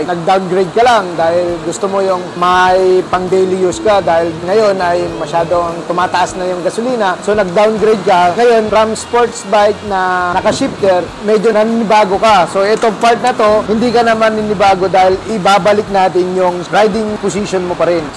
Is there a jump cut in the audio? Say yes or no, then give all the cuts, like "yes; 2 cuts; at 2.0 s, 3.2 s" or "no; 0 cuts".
no; 0 cuts